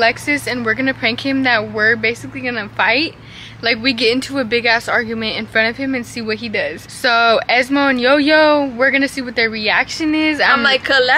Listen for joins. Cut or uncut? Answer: uncut